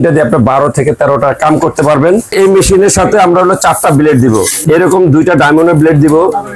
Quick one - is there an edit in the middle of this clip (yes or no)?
yes